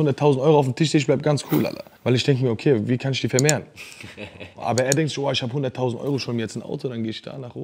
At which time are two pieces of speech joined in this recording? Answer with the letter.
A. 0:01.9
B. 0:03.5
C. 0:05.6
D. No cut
A